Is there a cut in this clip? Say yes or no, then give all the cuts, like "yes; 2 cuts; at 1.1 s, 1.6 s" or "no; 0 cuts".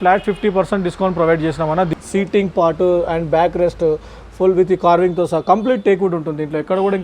yes; 1 cut; at 1.9 s